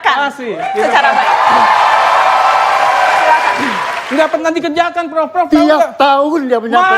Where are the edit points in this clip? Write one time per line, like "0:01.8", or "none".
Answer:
0:03.9